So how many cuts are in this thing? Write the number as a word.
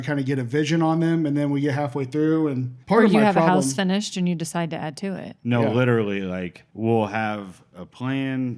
two